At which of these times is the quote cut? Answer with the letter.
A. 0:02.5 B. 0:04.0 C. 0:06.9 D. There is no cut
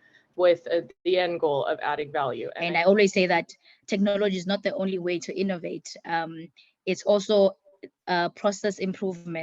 A